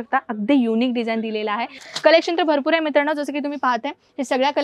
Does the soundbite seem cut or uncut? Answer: cut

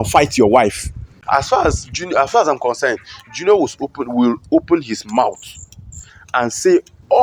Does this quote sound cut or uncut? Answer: cut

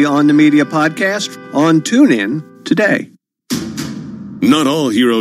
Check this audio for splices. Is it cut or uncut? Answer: cut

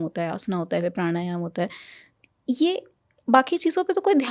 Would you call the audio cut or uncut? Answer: uncut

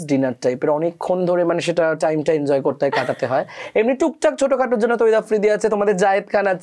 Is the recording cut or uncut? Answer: uncut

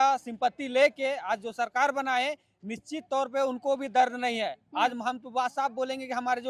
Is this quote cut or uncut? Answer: uncut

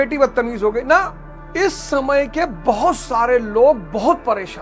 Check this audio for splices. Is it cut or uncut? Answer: uncut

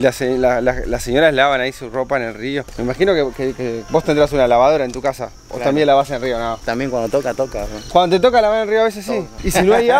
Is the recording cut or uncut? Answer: uncut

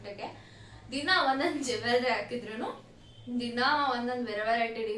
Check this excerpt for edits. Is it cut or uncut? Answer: uncut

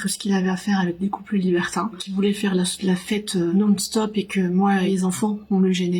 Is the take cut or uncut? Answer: cut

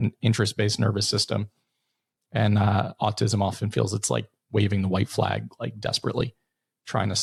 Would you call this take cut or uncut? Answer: uncut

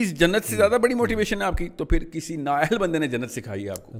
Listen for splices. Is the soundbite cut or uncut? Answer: uncut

